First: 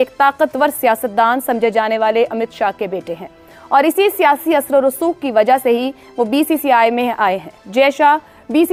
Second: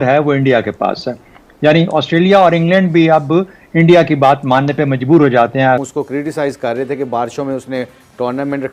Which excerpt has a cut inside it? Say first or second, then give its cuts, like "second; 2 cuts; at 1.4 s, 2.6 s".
second; 1 cut; at 5.8 s